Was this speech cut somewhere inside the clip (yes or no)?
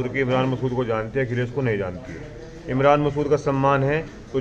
no